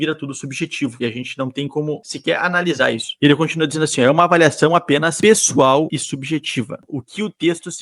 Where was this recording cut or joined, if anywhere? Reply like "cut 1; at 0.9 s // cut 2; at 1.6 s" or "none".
cut 1; at 0.9 s // cut 2; at 2.1 s // cut 3; at 5.1 s // cut 4; at 5.9 s